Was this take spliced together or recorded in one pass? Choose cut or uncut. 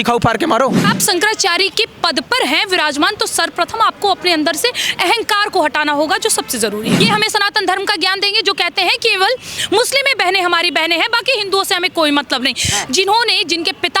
cut